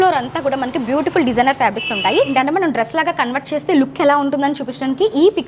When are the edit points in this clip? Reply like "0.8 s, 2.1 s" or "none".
2.3 s